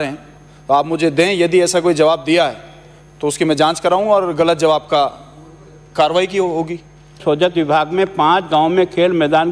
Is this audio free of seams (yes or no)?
no